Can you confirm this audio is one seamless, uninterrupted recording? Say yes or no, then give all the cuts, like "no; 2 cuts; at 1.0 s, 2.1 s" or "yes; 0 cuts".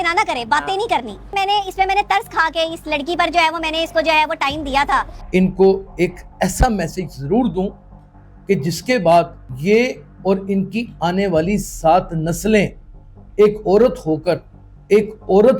no; 2 cuts; at 1.3 s, 5.2 s